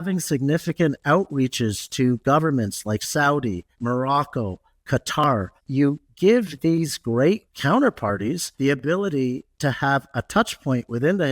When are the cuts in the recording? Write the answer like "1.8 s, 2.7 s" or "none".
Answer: 3.7 s, 5.6 s, 7.5 s, 8.5 s

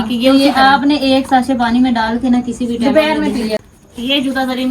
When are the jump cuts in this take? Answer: 3.7 s

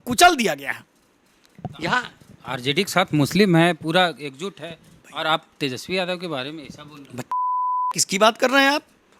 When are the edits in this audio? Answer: none

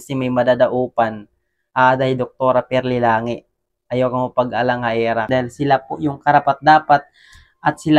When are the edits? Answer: 5.3 s

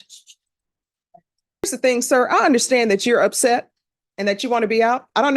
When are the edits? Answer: 1.6 s

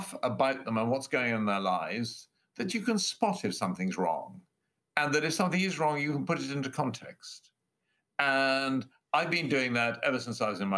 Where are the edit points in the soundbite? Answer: none

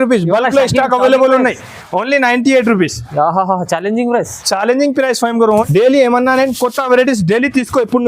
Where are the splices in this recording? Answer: 5.6 s

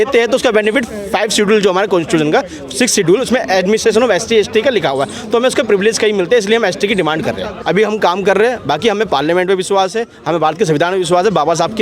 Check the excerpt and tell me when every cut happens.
7.5 s

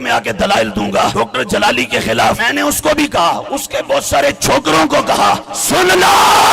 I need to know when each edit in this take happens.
1.1 s, 2.4 s, 5.5 s

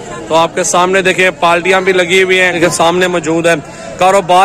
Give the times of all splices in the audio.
2.5 s

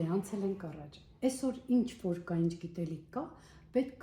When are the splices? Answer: none

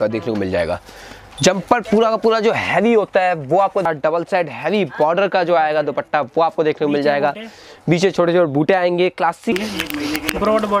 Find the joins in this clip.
3.9 s, 9.5 s

